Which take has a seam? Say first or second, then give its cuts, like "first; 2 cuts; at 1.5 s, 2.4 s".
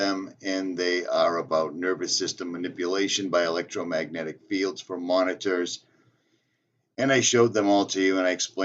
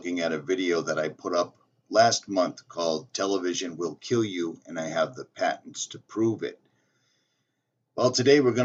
first; 1 cut; at 7.0 s